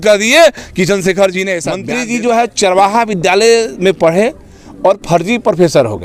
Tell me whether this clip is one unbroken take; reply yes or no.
no